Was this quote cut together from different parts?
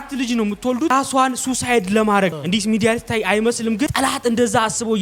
yes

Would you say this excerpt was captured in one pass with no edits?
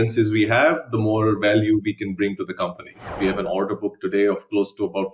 no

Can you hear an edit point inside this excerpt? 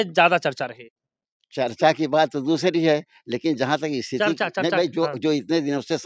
no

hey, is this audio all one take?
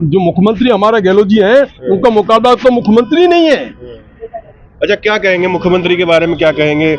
yes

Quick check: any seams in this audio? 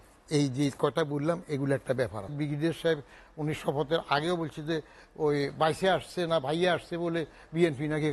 yes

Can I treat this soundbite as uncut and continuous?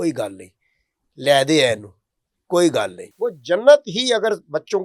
no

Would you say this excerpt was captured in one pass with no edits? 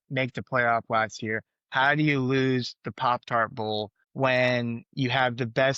yes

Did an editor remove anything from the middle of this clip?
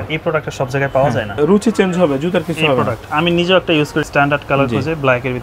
yes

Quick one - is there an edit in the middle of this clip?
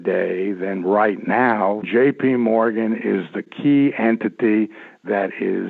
yes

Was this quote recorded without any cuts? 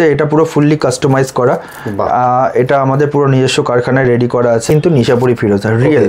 no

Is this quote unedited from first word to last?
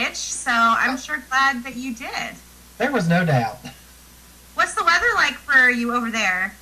yes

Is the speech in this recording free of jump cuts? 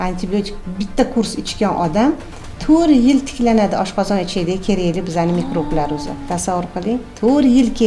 yes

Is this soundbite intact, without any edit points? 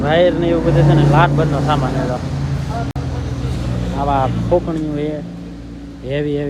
yes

